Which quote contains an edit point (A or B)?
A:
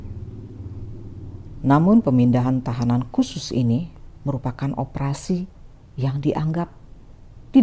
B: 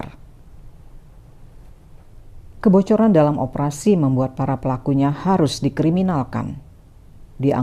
B